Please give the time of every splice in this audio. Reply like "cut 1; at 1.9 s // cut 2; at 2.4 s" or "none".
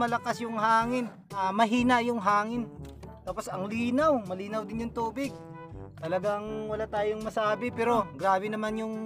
cut 1; at 1.4 s // cut 2; at 8.1 s